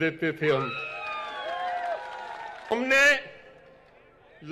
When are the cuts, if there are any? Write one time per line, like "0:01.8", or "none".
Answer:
0:02.7

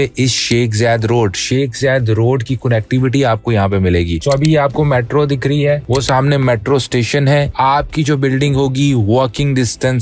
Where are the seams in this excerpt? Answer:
0:04.2

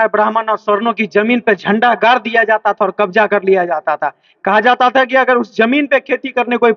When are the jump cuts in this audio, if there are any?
none

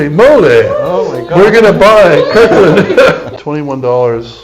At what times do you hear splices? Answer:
0:03.3

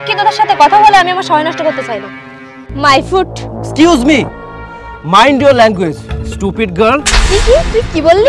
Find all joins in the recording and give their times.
0:02.7

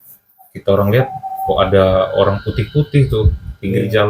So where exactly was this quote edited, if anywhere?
none

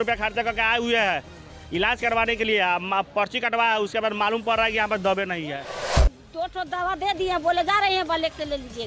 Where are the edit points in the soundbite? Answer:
0:06.2

